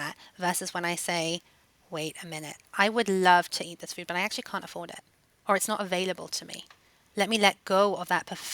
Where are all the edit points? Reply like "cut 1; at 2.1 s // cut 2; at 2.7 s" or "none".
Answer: cut 1; at 7.0 s

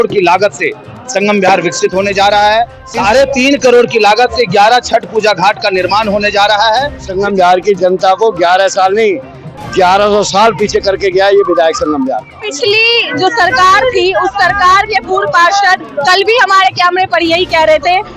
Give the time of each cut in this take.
cut 1; at 2.8 s // cut 2; at 7.1 s // cut 3; at 12.4 s

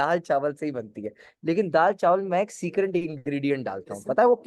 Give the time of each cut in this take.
none

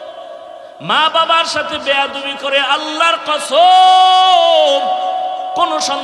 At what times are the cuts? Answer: none

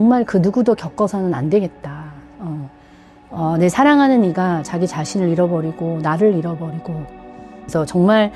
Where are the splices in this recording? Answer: none

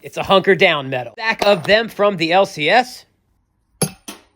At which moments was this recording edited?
cut 1; at 1.3 s

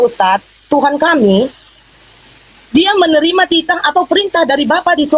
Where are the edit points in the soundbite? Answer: none

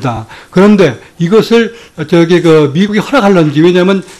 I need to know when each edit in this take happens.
cut 1; at 1.9 s

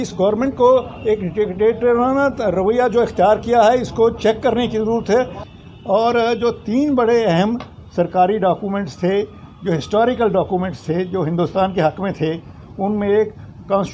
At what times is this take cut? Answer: cut 1; at 5.4 s

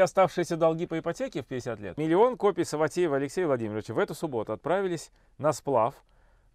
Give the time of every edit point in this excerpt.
cut 1; at 1.9 s

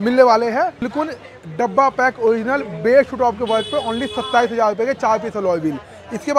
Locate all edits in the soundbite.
none

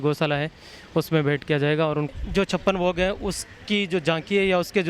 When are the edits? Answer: cut 1; at 2.1 s

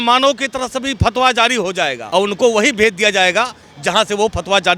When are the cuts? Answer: cut 1; at 2.0 s

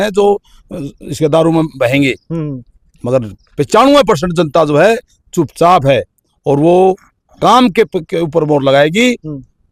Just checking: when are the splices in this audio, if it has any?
none

